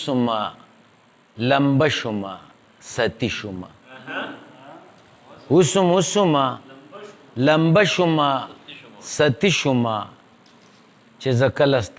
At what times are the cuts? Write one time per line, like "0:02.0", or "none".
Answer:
none